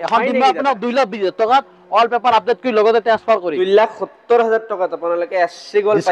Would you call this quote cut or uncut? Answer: cut